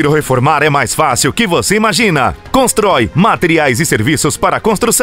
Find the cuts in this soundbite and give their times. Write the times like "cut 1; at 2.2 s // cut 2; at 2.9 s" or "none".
none